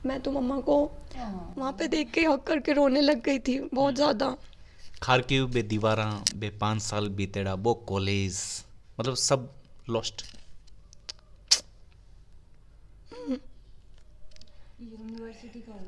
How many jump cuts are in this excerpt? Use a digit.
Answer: 0